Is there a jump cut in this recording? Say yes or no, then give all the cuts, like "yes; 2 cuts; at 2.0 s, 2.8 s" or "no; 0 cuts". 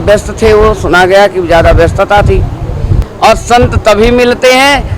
yes; 1 cut; at 3.0 s